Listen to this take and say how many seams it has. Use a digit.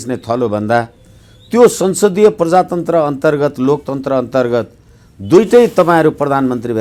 0